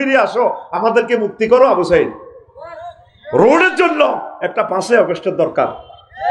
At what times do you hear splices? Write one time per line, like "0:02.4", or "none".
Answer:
none

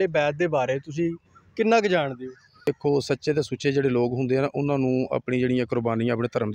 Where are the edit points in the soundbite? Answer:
0:02.7

